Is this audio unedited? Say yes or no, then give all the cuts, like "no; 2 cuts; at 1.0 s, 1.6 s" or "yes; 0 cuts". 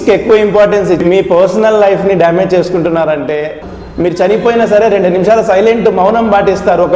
no; 2 cuts; at 1.0 s, 3.5 s